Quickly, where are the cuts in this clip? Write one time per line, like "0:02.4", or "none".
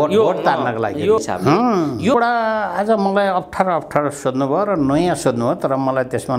0:01.2
0:02.1